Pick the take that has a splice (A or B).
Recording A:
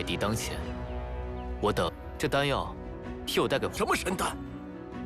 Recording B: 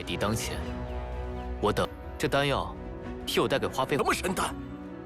A